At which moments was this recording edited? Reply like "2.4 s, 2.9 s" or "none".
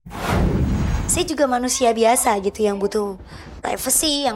0.9 s